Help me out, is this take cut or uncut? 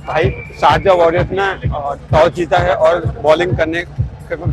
uncut